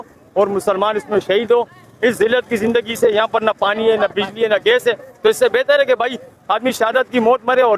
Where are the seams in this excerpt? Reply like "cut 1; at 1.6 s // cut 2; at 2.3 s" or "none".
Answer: none